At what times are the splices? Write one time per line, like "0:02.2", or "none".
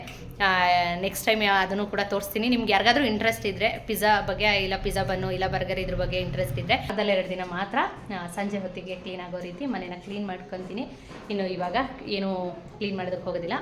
0:06.9

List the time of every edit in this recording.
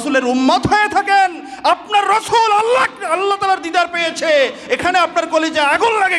none

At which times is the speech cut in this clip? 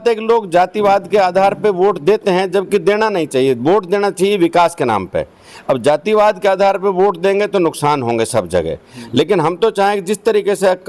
none

